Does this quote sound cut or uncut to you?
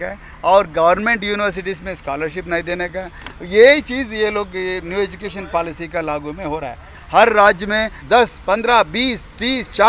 cut